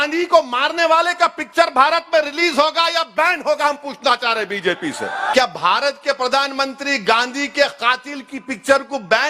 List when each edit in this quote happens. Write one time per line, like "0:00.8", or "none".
0:05.3